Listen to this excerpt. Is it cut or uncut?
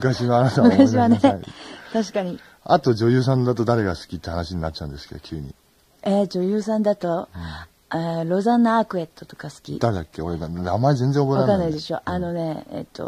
uncut